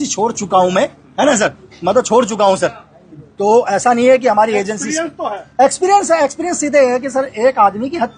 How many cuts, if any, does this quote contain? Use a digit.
0